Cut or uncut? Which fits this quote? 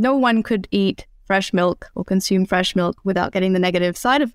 uncut